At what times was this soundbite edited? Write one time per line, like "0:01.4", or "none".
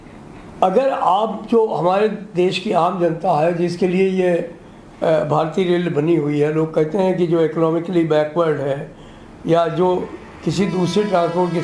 none